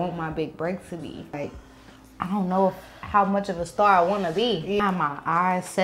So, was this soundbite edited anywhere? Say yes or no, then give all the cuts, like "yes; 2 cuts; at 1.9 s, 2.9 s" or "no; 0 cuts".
yes; 2 cuts; at 1.4 s, 4.8 s